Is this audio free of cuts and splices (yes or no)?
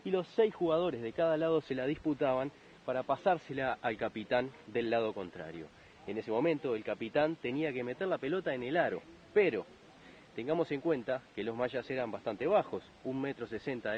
yes